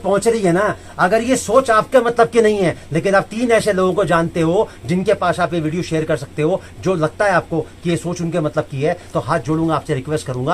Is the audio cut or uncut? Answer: uncut